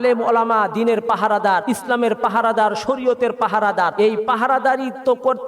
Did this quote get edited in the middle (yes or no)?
yes